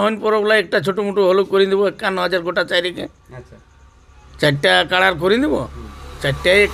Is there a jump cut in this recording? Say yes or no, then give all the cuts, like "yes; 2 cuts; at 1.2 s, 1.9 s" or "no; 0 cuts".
no; 0 cuts